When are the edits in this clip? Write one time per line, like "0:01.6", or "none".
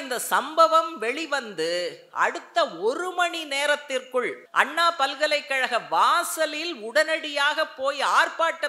0:04.4